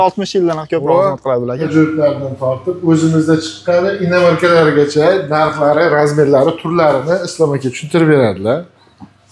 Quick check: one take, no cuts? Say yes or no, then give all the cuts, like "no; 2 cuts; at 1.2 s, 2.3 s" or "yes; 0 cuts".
no; 1 cut; at 1.7 s